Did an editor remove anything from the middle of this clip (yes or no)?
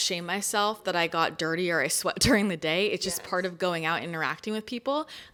no